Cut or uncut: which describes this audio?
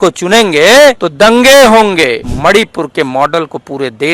cut